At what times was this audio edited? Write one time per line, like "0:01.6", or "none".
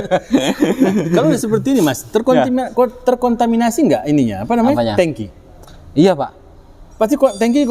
none